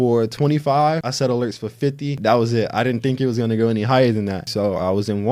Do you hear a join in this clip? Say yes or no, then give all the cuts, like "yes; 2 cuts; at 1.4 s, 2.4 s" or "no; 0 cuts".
yes; 3 cuts; at 1.1 s, 2.2 s, 4.5 s